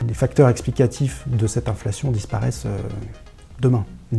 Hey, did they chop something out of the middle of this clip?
no; 0 cuts

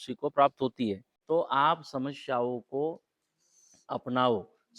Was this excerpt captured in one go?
no; 1 cut; at 1.1 s

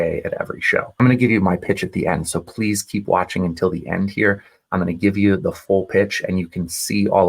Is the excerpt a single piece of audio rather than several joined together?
no; 1 cut; at 0.9 s

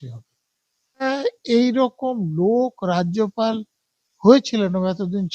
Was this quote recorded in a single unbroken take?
no; 1 cut; at 1.1 s

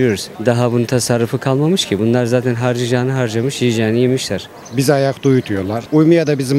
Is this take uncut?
no; 1 cut; at 4.4 s

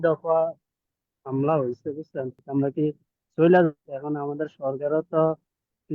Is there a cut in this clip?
yes; 2 cuts; at 2.4 s, 3.9 s

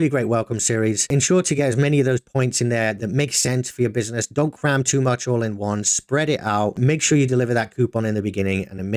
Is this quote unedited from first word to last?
no; 2 cuts; at 1.1 s, 3.0 s

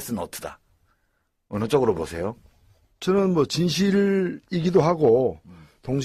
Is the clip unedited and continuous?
yes; 0 cuts

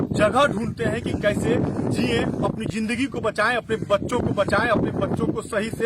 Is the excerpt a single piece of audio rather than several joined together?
yes; 0 cuts

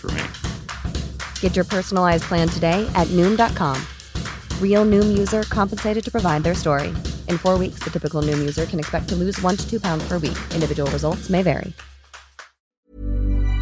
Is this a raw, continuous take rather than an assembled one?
no; 1 cut; at 12.7 s

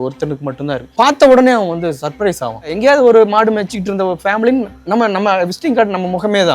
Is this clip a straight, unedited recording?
no; 2 cuts; at 0.9 s, 2.7 s

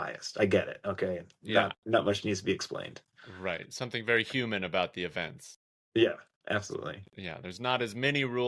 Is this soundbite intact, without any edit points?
yes; 0 cuts

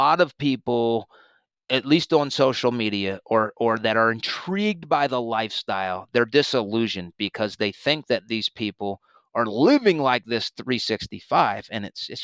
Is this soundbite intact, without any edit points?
yes; 0 cuts

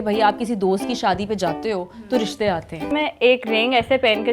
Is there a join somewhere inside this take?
yes; 1 cut; at 2.9 s

